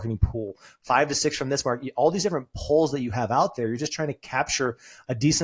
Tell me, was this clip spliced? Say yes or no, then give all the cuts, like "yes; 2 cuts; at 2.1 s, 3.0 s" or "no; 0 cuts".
no; 0 cuts